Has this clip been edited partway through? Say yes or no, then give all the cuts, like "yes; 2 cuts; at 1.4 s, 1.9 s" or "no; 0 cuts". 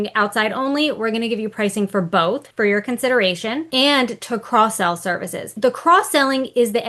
yes; 3 cuts; at 2.5 s, 3.6 s, 5.5 s